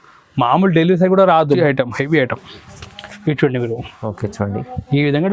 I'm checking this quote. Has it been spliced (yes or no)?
yes